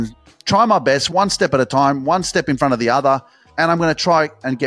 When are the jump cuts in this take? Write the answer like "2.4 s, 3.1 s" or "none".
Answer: 1.1 s